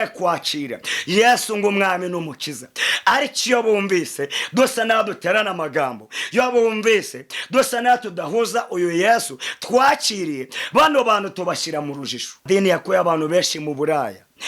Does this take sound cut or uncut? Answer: cut